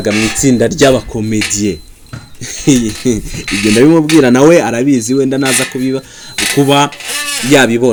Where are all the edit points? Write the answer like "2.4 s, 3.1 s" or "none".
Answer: none